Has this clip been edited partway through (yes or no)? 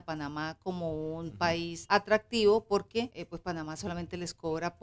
yes